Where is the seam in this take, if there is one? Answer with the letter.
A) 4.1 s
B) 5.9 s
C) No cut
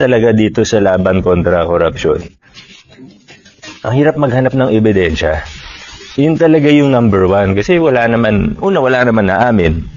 C